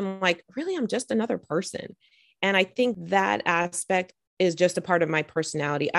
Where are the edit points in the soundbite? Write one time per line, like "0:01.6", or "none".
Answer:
0:03.0